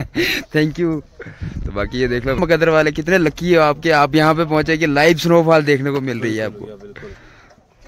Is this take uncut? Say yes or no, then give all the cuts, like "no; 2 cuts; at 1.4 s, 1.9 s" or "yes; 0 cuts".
no; 1 cut; at 2.4 s